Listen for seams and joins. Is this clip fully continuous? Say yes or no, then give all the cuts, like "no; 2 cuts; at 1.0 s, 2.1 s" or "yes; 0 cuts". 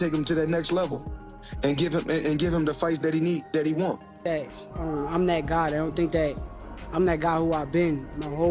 no; 1 cut; at 4.2 s